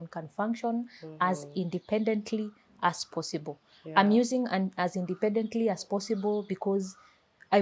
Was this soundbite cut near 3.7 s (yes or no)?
no